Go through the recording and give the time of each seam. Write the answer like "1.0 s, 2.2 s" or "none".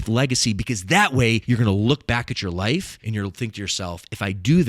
1.4 s, 3.0 s

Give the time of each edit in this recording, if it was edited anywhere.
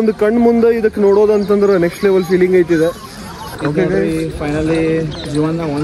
3.4 s

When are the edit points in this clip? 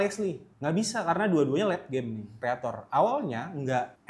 2.3 s

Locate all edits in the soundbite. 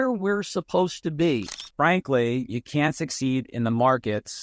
1.6 s

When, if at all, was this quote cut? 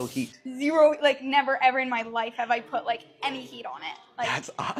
none

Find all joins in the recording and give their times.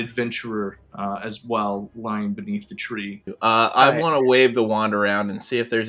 3.3 s

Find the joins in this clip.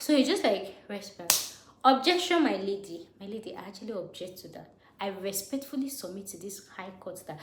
none

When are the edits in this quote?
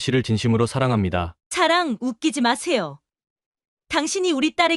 1.4 s

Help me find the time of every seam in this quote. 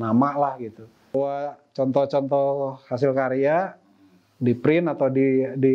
1.1 s

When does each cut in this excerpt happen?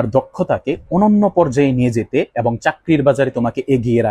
none

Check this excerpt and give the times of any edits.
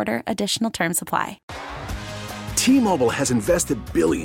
1.5 s

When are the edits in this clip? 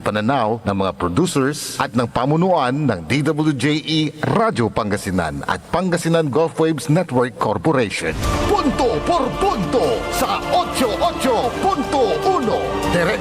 8.1 s

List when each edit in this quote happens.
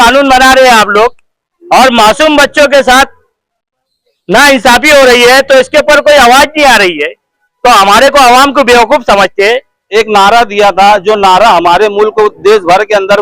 9.7 s

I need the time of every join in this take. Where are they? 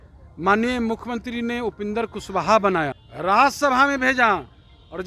3.0 s

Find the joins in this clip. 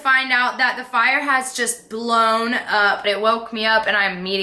3.1 s

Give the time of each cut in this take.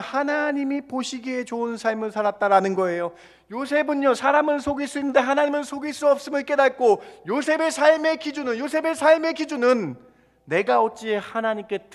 none

